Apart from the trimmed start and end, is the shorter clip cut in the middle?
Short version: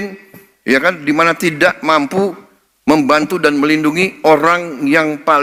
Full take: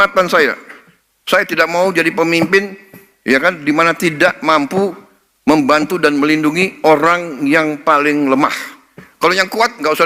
no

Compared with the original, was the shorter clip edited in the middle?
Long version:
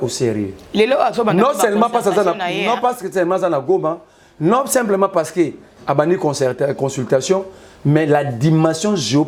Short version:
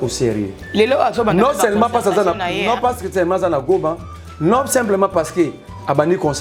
no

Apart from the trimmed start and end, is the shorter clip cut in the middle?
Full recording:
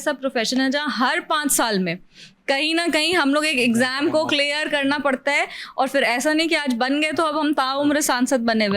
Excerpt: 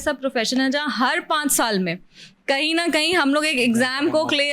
no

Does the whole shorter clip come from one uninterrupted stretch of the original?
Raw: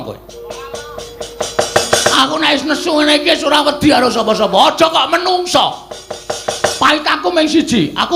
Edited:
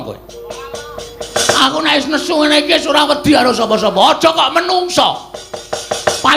no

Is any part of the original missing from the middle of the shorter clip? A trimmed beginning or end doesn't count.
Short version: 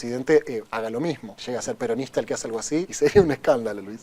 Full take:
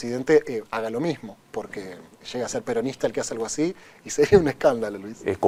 yes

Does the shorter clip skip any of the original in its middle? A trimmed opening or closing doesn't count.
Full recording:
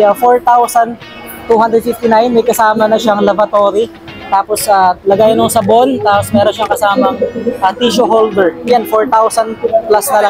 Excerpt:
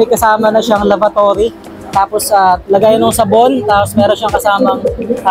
no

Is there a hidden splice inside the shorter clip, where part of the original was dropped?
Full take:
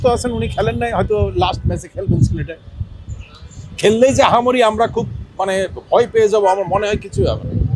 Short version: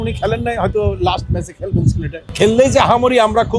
yes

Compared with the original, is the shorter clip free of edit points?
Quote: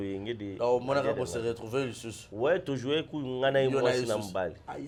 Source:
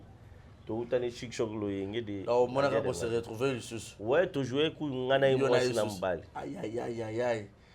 yes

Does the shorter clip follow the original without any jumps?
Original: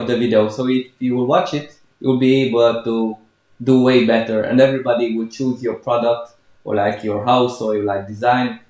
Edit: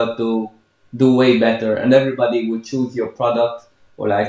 yes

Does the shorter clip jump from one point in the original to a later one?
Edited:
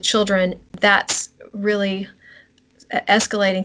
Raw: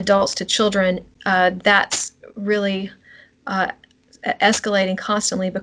yes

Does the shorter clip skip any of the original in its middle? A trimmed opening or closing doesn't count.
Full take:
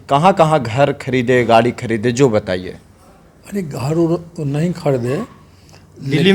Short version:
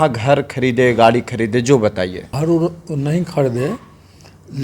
yes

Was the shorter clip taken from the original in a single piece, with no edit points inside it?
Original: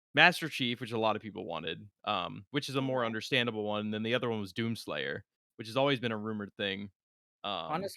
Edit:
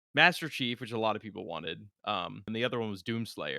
no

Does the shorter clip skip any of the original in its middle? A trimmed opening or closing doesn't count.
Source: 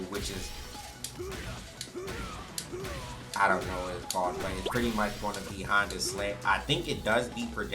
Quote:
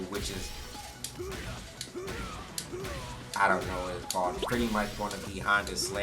yes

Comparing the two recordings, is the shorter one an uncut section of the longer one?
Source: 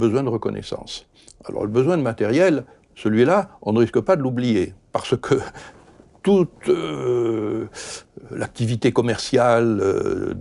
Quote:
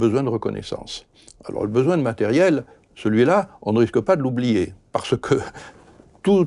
yes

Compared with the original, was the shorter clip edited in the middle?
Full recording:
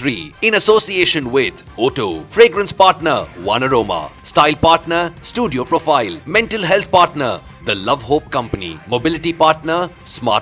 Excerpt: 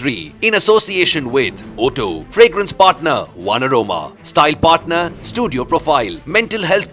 no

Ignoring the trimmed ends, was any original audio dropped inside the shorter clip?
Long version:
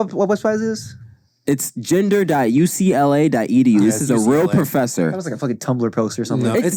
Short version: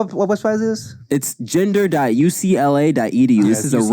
yes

